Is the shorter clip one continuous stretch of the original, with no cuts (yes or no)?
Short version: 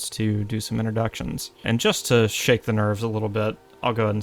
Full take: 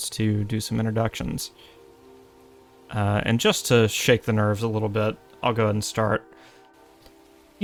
no